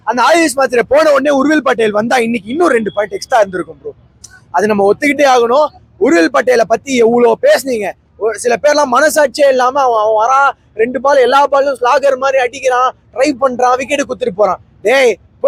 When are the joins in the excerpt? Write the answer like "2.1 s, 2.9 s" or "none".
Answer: none